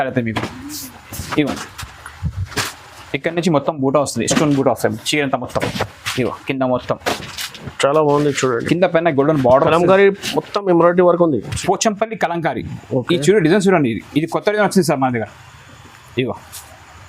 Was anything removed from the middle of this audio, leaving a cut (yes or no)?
yes